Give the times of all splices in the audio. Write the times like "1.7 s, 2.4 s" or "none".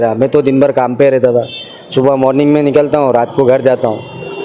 none